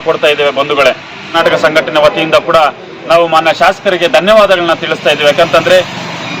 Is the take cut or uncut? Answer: cut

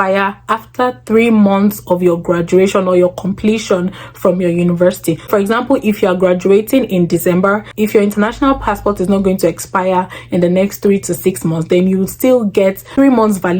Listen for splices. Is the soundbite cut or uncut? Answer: uncut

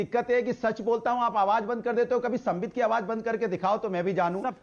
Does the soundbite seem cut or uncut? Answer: uncut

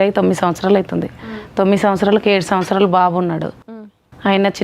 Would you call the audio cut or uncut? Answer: uncut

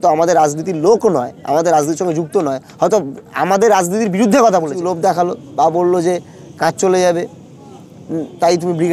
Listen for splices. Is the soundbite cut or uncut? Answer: cut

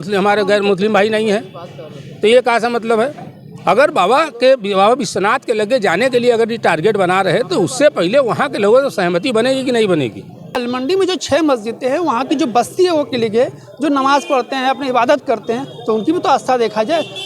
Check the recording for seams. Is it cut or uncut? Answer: cut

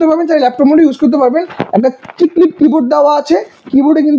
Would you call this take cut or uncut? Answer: uncut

